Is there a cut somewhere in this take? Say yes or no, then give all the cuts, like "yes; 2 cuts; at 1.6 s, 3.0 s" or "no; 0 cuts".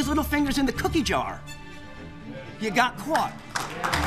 no; 0 cuts